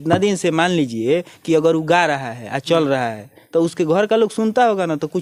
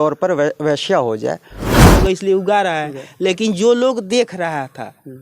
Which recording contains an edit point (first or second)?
second